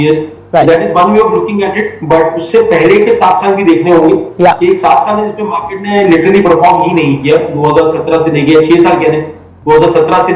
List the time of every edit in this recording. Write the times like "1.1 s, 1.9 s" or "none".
none

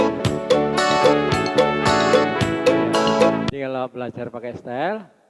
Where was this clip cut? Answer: 3.5 s

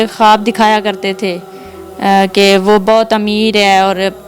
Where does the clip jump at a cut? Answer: none

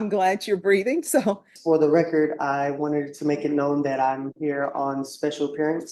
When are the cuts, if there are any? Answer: 1.5 s

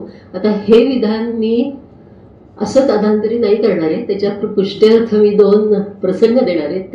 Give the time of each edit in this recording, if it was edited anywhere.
none

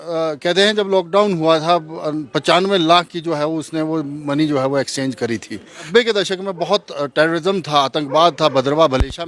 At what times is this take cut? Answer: 5.8 s

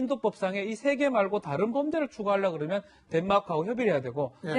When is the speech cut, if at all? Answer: 3.2 s

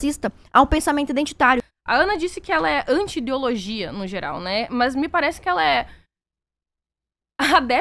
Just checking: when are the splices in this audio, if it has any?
1.8 s

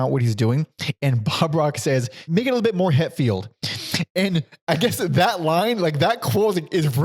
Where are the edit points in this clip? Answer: 2.2 s

